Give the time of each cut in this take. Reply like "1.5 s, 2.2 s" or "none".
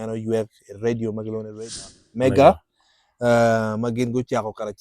1.8 s